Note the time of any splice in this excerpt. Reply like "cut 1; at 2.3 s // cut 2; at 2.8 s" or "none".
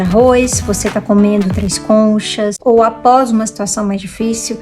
cut 1; at 2.5 s